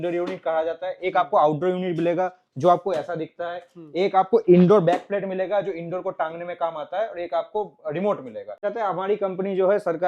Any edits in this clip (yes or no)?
yes